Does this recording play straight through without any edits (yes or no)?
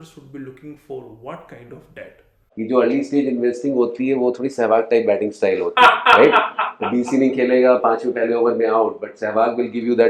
no